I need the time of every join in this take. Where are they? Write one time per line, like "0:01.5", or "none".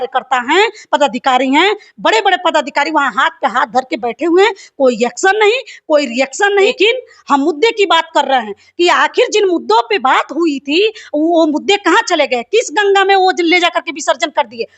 0:06.7

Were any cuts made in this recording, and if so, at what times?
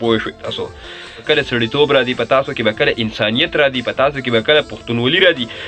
0:01.2

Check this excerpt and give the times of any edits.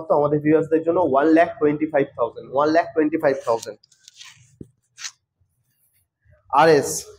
none

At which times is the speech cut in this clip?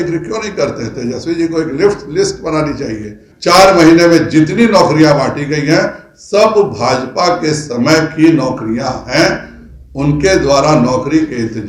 0:03.3

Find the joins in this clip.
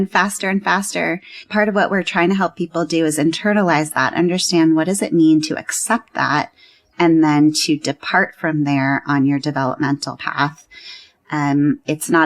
0:01.3

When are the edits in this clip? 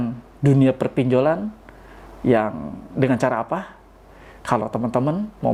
none

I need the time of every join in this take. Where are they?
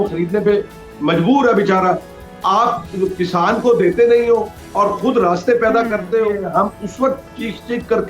0:06.4

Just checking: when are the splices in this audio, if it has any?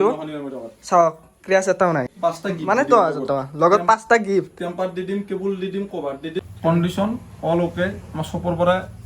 0:02.1
0:06.4

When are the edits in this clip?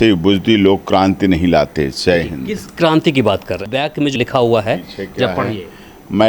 0:02.7
0:03.8

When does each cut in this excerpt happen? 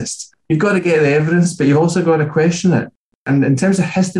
0:03.2

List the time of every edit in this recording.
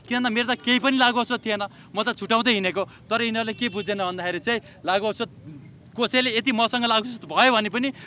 none

